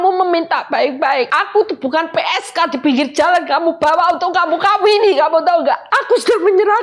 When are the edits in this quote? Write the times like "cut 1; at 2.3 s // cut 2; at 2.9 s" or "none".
cut 1; at 1.4 s // cut 2; at 5.9 s